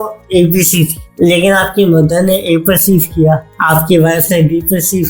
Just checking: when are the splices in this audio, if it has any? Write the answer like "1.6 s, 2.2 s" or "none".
none

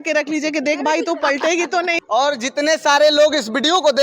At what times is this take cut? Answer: none

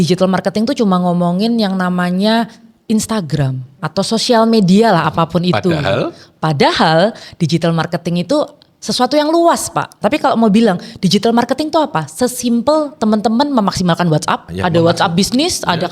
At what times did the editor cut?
3.8 s, 10.0 s, 14.5 s

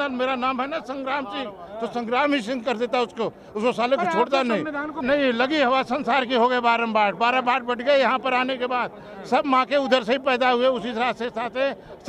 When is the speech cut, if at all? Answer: 4.9 s

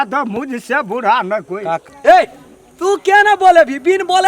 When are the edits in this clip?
1.9 s

